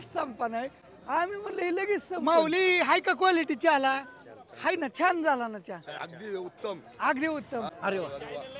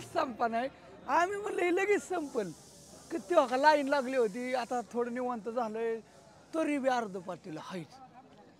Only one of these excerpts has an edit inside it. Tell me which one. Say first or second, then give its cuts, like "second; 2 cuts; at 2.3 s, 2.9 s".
first; 2 cuts; at 2.2 s, 7.7 s